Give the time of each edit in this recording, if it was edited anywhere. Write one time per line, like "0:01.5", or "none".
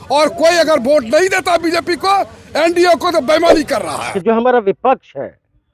0:04.1